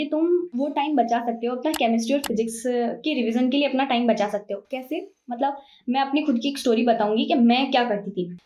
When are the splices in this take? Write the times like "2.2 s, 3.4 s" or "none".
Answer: none